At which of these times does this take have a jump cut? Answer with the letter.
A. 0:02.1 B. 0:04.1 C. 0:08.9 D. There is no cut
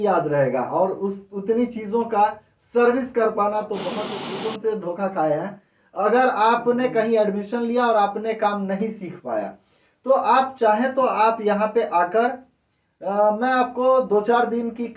B